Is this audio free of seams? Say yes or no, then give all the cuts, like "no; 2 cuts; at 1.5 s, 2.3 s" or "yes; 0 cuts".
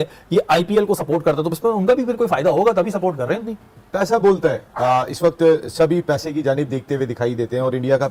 yes; 0 cuts